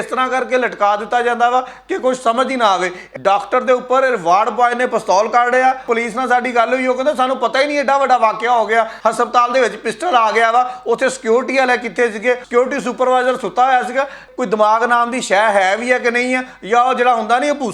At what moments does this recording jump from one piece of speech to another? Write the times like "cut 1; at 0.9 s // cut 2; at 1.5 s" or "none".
cut 1; at 3.0 s // cut 2; at 5.8 s // cut 3; at 8.9 s // cut 4; at 12.4 s // cut 5; at 14.2 s